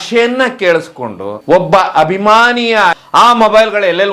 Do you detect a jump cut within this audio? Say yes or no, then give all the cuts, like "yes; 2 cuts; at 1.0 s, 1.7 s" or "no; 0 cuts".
yes; 1 cut; at 2.9 s